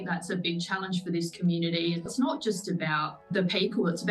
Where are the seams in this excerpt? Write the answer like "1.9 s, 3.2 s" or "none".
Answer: 2.1 s